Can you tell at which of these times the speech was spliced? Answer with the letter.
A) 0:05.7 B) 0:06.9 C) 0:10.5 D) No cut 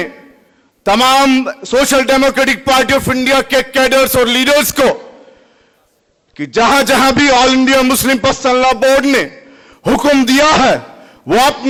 D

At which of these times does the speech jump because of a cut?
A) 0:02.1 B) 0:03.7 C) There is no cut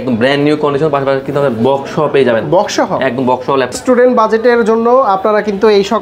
B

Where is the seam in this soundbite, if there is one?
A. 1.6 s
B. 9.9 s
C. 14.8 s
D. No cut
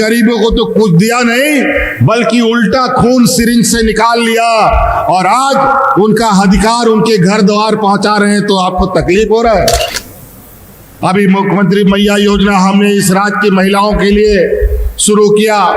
B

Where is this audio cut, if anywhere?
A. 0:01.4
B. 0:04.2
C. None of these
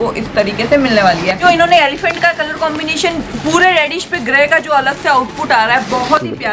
A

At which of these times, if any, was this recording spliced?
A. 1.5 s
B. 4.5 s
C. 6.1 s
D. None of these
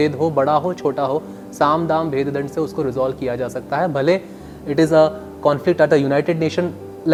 D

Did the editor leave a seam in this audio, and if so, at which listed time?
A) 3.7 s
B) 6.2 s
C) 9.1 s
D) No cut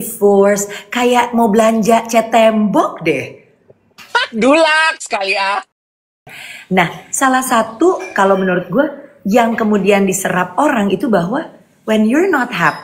B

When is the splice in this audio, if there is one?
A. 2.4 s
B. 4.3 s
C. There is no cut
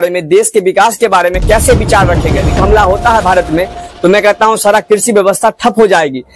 A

